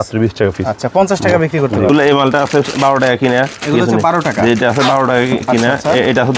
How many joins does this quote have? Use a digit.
1